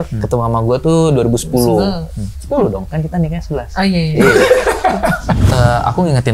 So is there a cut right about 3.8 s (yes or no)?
no